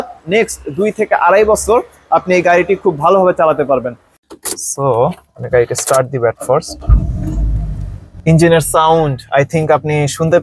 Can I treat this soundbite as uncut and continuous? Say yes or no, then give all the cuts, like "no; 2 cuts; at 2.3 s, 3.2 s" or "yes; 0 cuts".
no; 1 cut; at 4.1 s